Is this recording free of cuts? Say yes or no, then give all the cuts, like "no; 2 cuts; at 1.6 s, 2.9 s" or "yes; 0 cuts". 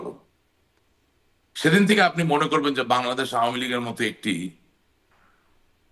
yes; 0 cuts